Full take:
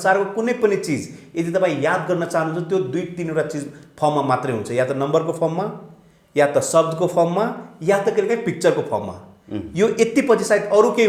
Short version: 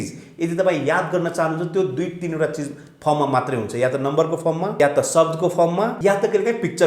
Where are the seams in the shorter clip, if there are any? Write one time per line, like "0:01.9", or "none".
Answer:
0:04.7
0:05.9